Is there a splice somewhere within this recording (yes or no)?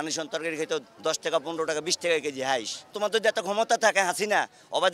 yes